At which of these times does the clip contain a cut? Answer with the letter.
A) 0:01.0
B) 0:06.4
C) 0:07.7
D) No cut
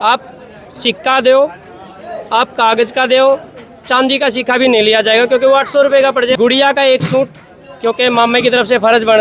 B